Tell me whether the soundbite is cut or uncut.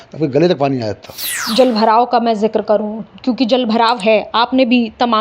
cut